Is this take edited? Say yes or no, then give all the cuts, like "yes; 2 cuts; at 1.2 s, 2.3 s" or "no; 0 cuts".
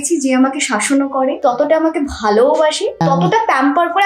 yes; 2 cuts; at 1.4 s, 3.0 s